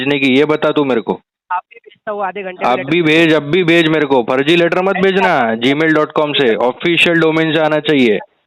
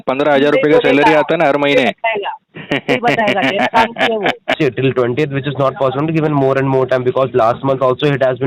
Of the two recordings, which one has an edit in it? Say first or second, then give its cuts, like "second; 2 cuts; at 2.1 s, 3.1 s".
second; 1 cut; at 4.6 s